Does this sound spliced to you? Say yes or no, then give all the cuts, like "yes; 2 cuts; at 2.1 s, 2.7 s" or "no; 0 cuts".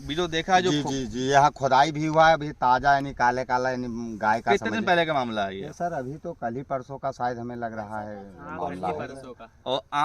no; 0 cuts